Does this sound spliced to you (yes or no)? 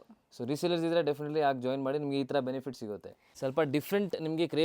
yes